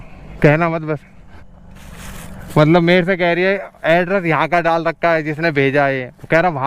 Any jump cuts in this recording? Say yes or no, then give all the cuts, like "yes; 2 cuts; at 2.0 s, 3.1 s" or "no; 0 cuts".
yes; 1 cut; at 1.4 s